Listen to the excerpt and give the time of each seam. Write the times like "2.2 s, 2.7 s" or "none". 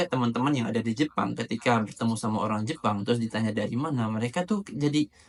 none

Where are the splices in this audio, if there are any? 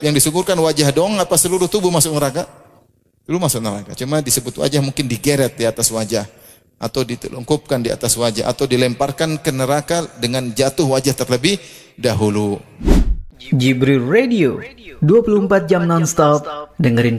12.9 s

